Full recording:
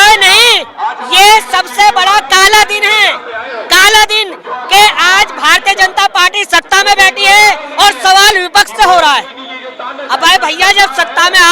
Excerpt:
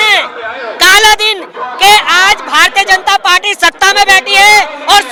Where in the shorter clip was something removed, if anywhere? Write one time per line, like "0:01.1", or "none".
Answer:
none